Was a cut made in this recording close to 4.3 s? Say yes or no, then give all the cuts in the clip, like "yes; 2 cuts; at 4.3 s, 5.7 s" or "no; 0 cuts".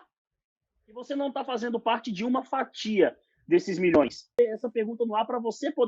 yes; 1 cut; at 4.3 s